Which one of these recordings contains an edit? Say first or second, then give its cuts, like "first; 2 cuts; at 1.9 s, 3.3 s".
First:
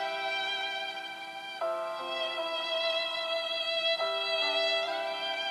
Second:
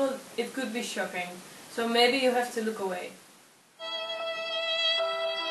second; 1 cut; at 3.8 s